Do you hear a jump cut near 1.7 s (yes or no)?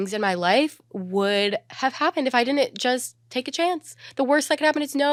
no